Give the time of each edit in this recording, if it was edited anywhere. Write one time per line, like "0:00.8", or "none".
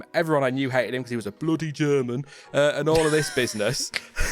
none